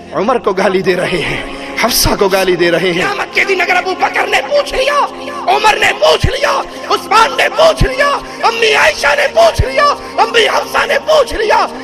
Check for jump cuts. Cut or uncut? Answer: cut